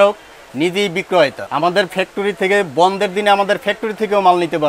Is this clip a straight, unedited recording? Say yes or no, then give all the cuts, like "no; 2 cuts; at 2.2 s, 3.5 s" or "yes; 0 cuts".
no; 1 cut; at 1.4 s